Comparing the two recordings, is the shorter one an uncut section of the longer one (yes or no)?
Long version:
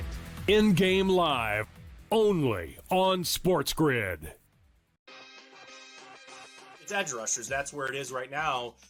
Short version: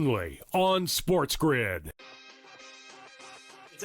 no